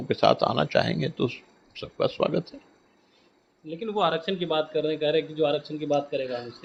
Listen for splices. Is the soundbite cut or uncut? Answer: uncut